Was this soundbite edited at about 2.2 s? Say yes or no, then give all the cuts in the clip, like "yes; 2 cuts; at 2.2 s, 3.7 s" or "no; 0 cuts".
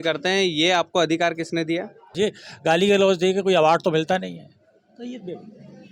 yes; 1 cut; at 2.2 s